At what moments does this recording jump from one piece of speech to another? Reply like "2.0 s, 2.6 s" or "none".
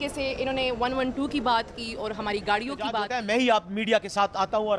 3.0 s